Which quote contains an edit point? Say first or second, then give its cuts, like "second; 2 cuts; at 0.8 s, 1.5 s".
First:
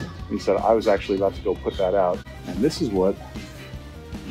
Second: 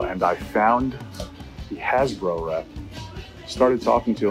first; 1 cut; at 2.2 s